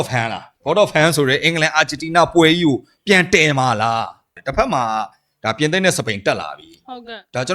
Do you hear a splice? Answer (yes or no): yes